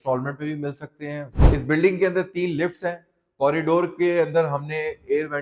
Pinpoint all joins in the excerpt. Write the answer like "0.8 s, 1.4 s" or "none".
1.3 s